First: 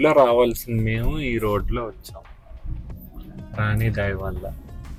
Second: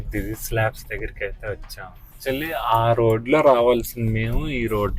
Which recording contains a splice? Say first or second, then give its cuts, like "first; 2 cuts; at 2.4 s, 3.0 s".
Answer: second; 1 cut; at 2.2 s